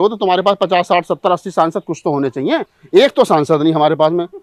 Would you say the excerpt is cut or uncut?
uncut